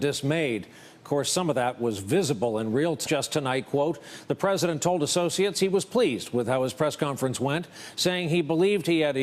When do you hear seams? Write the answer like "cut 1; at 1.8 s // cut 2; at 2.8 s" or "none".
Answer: none